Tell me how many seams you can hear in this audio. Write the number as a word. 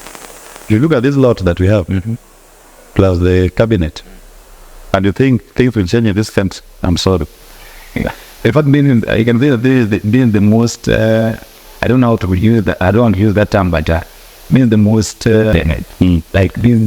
one